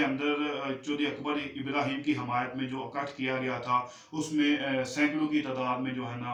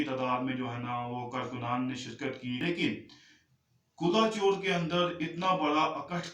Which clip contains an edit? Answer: second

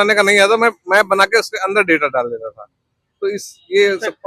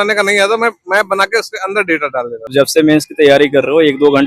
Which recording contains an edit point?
second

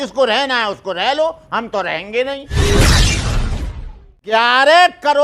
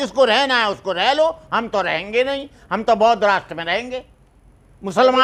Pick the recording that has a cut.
first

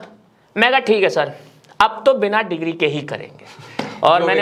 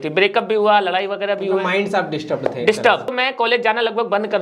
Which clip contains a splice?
second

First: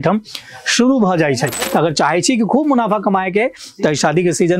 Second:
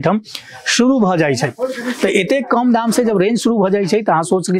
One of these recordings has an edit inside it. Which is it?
first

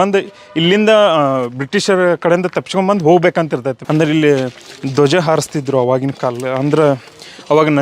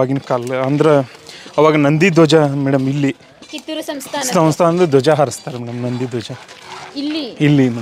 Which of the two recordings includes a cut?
first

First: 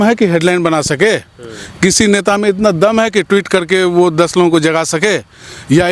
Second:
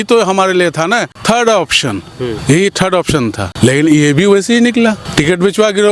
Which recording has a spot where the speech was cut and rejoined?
second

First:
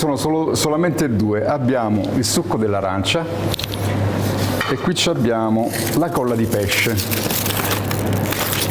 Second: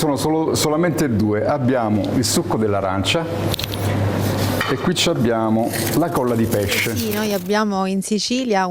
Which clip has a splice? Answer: second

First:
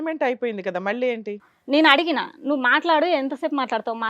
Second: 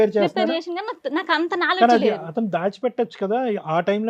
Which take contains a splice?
first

